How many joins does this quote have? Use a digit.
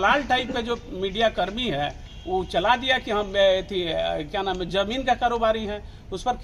0